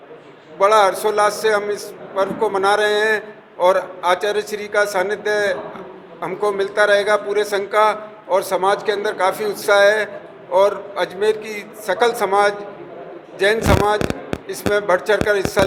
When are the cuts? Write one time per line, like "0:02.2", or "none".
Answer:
none